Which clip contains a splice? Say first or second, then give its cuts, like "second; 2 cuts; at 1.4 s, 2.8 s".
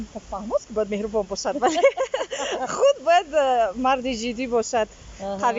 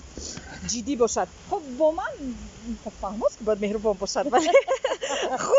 second; 1 cut; at 1.4 s